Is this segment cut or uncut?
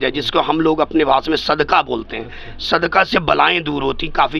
uncut